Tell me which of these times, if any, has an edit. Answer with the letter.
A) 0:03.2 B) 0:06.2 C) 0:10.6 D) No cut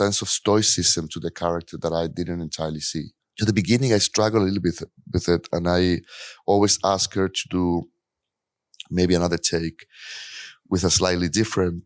A